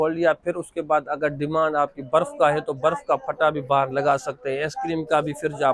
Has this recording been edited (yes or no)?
no